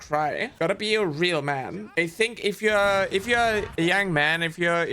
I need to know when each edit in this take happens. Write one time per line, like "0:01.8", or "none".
none